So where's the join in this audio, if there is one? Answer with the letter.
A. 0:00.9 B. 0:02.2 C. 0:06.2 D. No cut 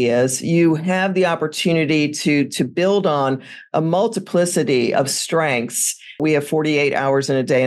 C